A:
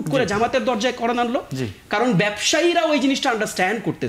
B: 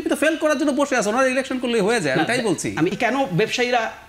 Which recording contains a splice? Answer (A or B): B